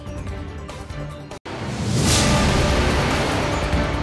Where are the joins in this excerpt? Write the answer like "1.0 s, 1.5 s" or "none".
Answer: none